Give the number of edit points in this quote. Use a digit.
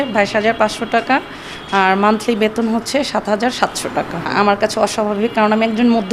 1